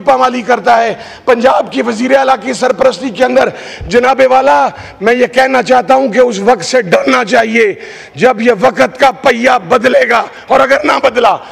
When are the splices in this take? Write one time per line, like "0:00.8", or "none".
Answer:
none